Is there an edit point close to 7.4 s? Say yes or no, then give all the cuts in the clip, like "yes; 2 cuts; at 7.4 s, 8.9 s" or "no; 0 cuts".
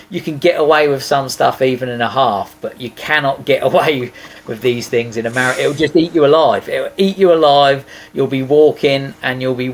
no; 0 cuts